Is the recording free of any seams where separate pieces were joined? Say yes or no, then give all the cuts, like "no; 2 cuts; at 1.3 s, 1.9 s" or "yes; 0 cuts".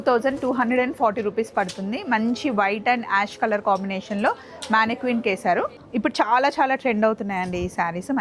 no; 1 cut; at 5.8 s